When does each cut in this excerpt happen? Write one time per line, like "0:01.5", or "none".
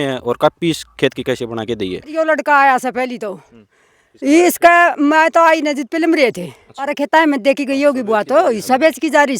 0:02.1
0:06.9

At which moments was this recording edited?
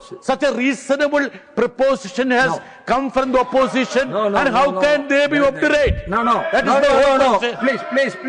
none

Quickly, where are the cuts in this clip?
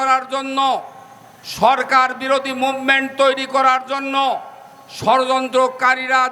none

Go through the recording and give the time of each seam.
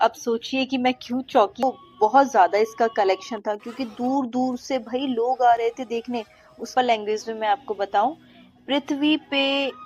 0:01.6
0:06.7

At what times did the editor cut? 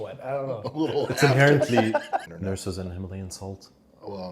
0:02.3

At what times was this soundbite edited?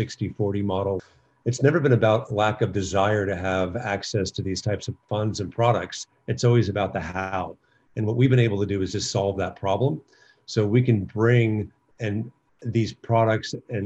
0:01.0
0:04.9

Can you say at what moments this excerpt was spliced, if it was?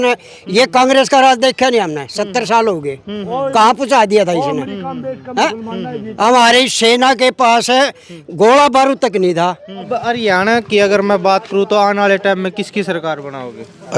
0:09.9

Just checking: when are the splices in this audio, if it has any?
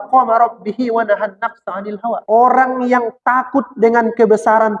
0:02.2

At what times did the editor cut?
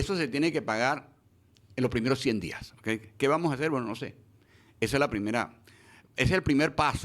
none

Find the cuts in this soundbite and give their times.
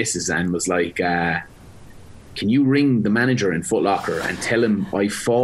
none

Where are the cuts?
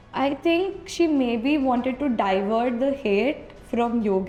none

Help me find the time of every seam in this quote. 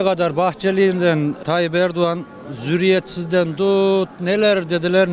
0:01.4

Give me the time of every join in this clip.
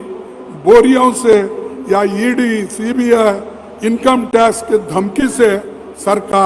none

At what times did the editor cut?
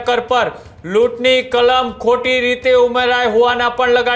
none

